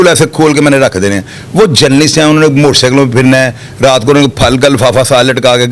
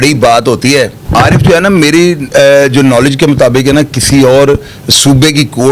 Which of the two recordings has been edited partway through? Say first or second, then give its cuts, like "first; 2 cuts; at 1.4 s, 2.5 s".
second; 1 cut; at 1.0 s